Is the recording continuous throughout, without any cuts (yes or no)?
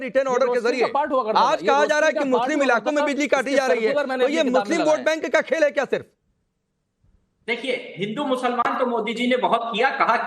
no